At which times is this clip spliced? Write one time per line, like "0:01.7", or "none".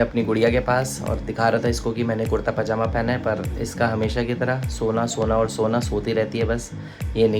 none